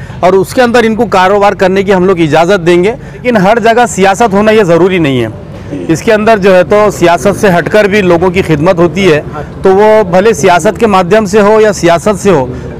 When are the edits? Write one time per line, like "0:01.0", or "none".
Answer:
0:03.2